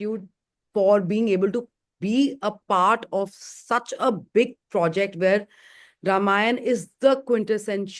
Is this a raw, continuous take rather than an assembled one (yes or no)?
yes